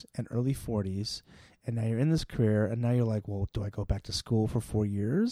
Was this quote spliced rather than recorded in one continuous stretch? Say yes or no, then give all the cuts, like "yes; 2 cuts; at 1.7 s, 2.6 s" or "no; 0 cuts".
no; 0 cuts